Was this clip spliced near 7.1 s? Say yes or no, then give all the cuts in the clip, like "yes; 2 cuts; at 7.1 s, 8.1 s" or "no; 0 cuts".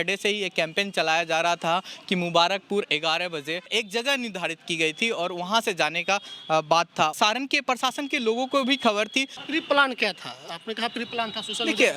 yes; 3 cuts; at 3.7 s, 7.1 s, 9.4 s